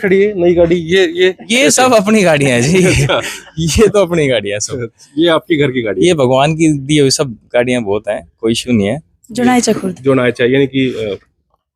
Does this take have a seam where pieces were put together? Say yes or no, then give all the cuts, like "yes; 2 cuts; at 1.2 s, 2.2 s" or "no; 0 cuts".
yes; 1 cut; at 9.2 s